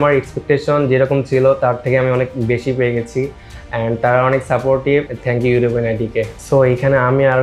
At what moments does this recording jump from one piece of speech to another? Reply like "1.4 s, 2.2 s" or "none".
6.3 s